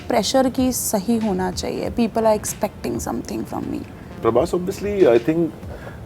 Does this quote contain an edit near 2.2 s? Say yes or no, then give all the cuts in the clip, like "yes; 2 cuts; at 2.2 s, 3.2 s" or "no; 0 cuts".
no; 1 cut; at 4.2 s